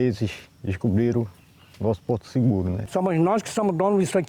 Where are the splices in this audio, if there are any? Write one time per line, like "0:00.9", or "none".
0:02.8